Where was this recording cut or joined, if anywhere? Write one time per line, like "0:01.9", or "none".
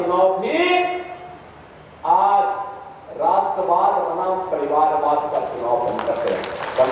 none

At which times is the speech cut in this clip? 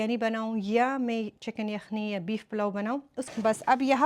0:03.2

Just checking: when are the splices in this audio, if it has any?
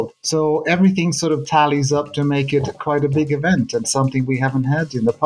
none

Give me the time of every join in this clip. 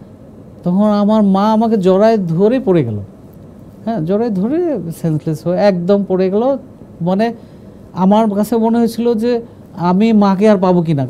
none

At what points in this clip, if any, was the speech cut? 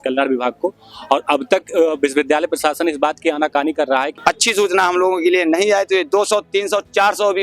0:04.2

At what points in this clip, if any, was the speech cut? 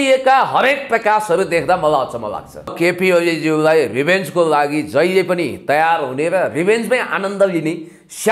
0:02.7

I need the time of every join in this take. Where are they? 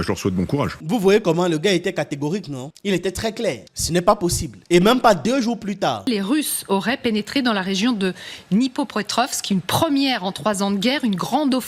0:00.8
0:04.6

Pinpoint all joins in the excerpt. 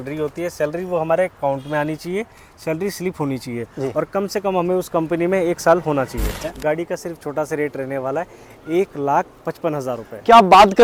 none

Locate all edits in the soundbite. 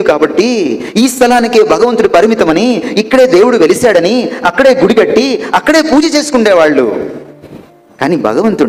none

